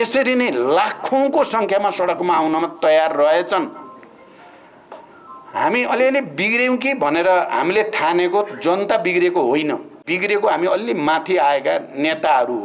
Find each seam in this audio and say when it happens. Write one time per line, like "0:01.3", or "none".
0:10.0